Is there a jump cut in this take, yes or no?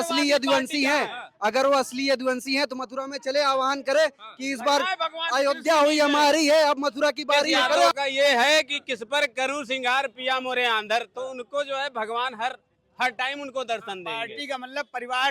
yes